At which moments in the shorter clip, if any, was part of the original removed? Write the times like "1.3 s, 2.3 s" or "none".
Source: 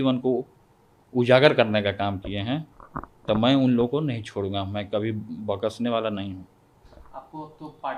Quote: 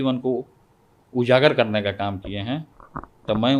none